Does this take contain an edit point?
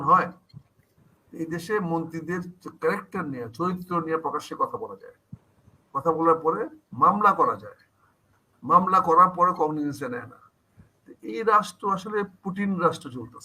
no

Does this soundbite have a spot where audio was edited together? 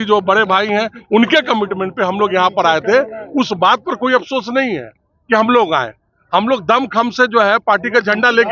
no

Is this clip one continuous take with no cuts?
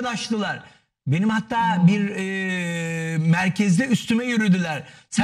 yes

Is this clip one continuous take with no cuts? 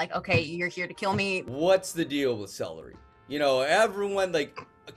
no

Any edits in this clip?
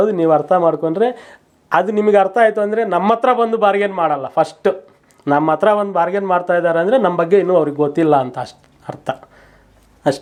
no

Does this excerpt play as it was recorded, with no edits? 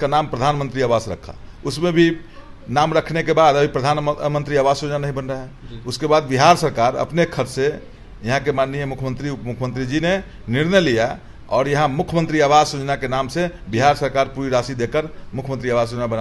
yes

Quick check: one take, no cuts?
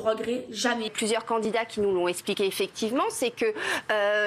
no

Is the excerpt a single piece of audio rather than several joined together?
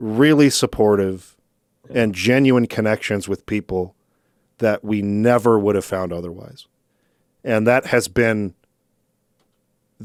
yes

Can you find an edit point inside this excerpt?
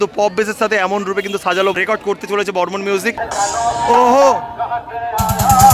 yes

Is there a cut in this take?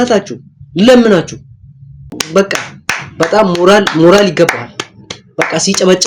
yes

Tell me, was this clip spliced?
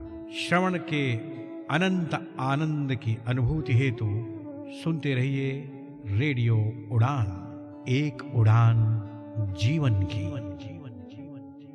no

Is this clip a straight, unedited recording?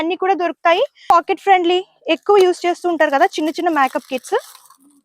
no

